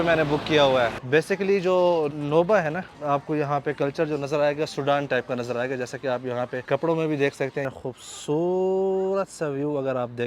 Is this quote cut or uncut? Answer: cut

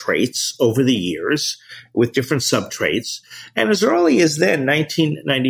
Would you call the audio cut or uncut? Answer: uncut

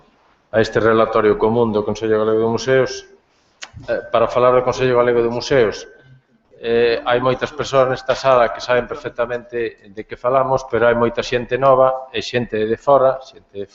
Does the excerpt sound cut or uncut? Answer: uncut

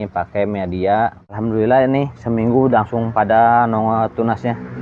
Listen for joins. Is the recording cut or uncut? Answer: cut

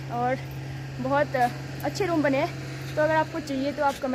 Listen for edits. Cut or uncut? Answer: uncut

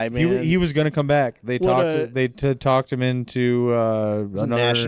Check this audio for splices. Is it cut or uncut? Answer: uncut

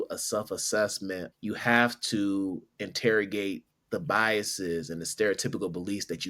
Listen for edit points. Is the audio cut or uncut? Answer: cut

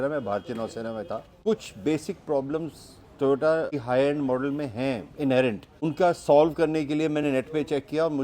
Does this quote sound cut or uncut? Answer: cut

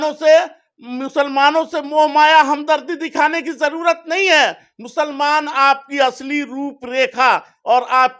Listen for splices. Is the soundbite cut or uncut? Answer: uncut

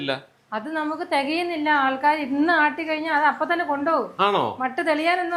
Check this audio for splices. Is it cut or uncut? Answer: uncut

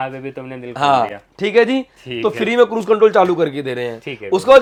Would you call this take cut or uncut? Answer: uncut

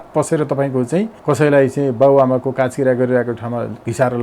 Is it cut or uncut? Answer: cut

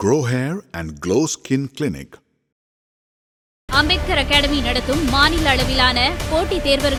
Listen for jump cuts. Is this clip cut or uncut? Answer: uncut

